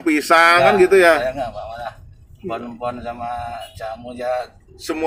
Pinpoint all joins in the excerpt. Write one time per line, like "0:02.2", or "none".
none

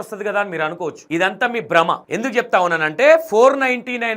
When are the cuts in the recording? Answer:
0:01.0
0:02.1

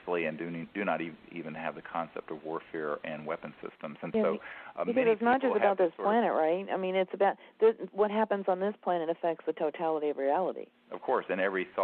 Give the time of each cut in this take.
0:03.8

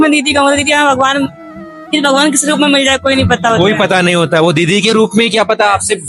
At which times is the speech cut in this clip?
none

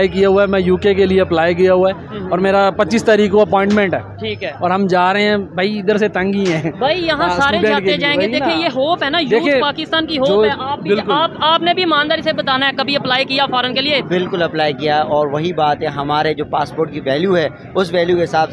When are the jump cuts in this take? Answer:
none

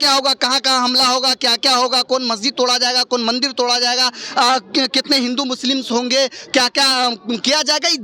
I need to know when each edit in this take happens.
none

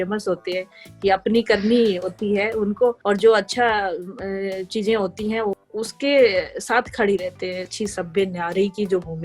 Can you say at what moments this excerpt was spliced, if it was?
0:03.0
0:05.6
0:07.7

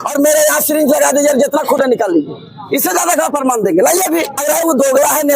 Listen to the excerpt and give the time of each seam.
0:04.4

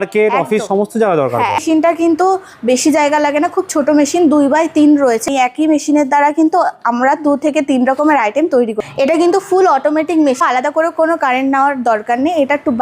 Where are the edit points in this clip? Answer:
0:01.6
0:05.2
0:08.8
0:10.4

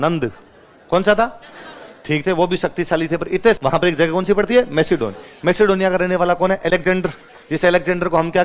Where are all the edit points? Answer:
0:03.6

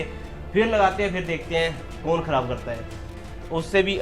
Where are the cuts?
none

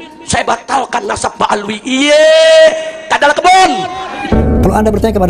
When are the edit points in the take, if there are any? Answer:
0:04.1

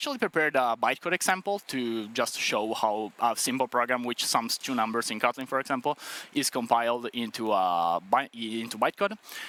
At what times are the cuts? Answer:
none

